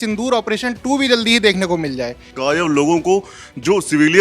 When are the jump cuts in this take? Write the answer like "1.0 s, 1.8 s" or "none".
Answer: 2.3 s